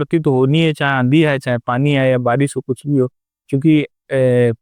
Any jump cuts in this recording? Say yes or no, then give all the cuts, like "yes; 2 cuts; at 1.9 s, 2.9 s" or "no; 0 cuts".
no; 0 cuts